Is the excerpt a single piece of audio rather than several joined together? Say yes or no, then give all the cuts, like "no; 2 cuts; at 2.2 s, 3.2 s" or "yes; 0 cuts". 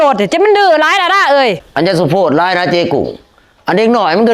no; 1 cut; at 1.6 s